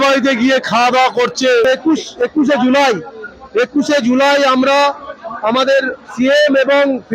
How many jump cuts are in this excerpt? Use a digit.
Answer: 1